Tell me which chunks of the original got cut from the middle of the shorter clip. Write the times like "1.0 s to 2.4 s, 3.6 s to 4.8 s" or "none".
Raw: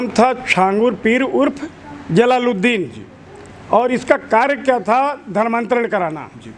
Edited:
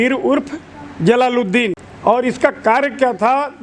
3.0 s to 3.5 s